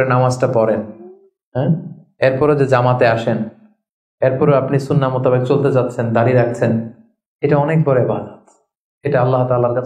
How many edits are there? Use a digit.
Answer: 0